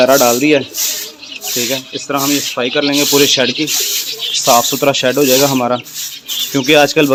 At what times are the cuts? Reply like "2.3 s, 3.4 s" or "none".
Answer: none